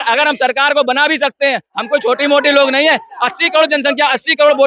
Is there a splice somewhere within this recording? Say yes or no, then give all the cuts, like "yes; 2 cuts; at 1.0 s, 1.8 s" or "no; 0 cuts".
no; 0 cuts